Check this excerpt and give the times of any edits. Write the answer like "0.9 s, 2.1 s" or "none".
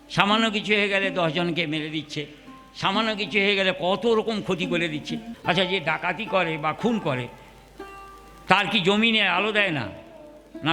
5.3 s